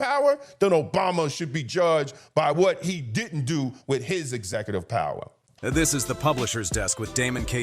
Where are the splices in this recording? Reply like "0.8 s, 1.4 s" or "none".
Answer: 5.5 s

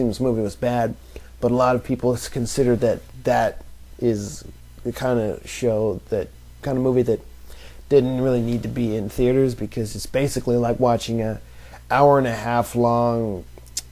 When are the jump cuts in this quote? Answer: none

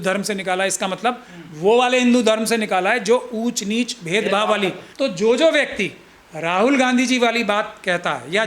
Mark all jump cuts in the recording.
4.8 s

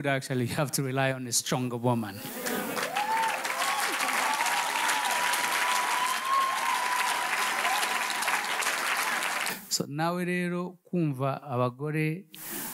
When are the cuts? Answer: 9.5 s

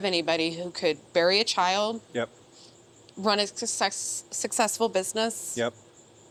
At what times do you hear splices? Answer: none

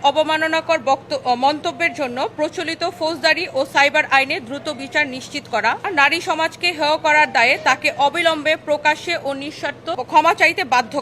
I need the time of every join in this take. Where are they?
5.9 s, 10.0 s

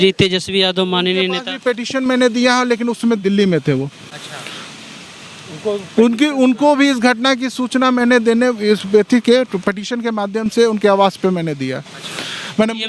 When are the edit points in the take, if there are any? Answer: none

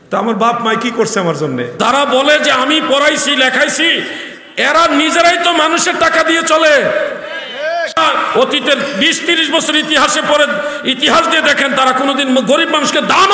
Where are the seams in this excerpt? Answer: 1.7 s, 7.9 s

